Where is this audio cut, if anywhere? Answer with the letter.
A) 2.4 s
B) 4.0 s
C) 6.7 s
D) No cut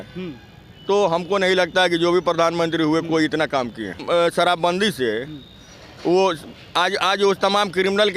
B